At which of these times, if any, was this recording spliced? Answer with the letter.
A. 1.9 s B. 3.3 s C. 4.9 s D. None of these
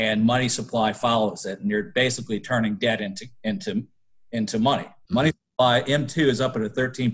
C